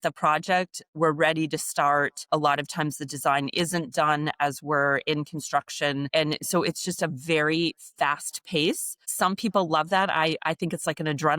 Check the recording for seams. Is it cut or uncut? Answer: cut